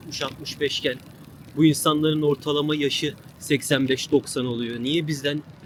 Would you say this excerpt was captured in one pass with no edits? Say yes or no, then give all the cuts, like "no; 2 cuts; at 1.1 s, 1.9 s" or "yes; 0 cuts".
yes; 0 cuts